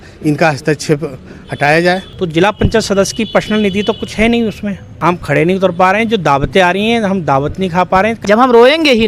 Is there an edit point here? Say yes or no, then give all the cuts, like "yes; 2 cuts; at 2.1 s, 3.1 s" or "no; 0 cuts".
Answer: yes; 3 cuts; at 2.1 s, 4.9 s, 8.2 s